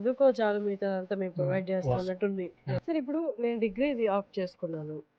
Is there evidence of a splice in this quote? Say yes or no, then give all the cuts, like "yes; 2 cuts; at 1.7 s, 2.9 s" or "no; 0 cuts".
yes; 1 cut; at 2.8 s